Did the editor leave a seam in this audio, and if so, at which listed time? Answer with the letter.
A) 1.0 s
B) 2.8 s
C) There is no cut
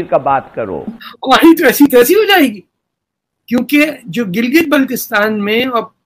A